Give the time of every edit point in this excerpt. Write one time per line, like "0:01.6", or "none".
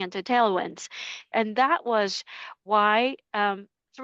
0:01.3